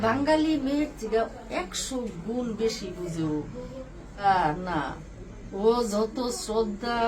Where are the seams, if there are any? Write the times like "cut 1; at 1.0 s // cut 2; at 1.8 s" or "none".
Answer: cut 1; at 4.2 s